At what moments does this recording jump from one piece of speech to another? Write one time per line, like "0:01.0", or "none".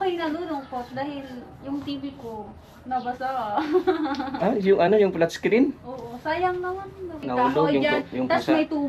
0:07.2